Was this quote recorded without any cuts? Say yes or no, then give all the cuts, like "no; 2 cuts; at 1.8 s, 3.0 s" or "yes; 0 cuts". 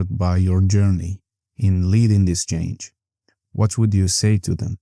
yes; 0 cuts